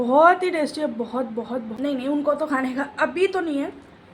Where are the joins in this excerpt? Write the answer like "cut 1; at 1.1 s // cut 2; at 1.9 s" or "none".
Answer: cut 1; at 1.7 s